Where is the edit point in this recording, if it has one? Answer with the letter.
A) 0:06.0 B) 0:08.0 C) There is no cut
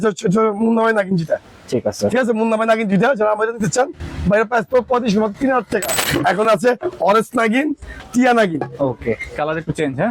A